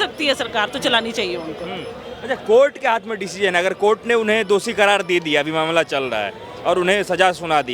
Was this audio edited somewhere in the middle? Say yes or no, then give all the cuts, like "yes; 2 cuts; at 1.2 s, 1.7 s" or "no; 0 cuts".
no; 0 cuts